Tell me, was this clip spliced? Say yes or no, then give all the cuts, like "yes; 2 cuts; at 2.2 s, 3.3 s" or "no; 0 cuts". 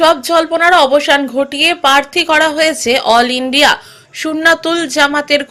no; 0 cuts